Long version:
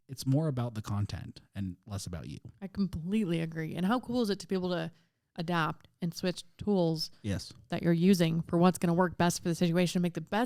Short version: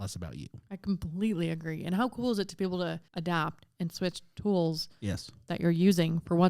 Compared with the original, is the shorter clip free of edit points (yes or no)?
no